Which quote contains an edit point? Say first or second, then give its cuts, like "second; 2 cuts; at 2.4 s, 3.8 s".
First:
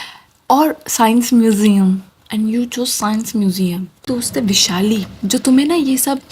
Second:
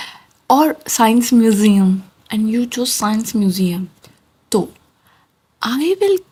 first; 1 cut; at 4.1 s